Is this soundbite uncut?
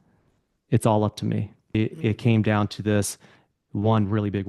no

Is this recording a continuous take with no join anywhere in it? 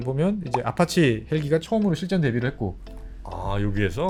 yes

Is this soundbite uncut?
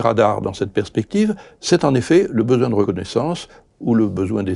no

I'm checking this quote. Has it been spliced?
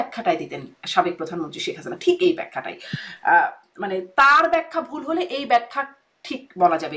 no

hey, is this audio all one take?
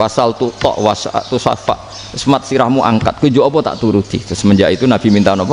yes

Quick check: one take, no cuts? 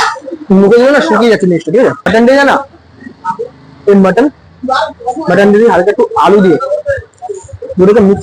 no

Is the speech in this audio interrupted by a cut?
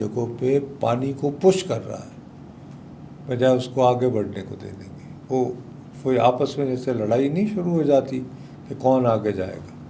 no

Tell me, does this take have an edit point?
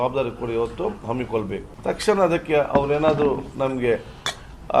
yes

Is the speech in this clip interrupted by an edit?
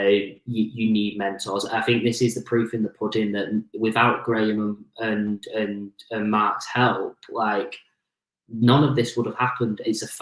no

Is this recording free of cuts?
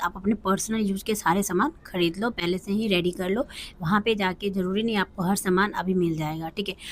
yes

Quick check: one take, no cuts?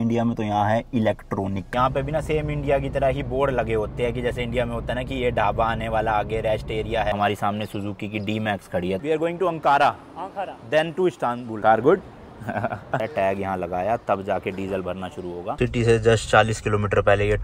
no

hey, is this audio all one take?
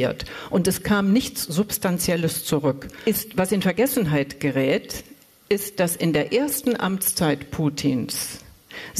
no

